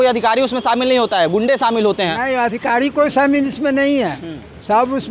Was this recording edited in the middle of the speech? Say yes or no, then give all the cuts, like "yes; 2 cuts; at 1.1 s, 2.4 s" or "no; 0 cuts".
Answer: no; 0 cuts